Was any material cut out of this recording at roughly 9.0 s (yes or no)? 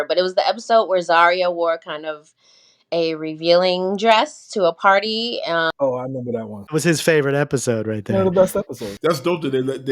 yes